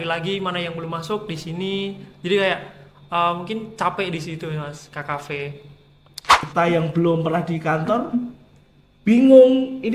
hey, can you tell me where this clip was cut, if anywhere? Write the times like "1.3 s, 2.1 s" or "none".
6.4 s